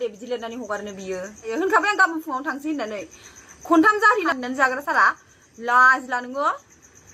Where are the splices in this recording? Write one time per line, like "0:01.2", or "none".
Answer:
0:01.5
0:04.4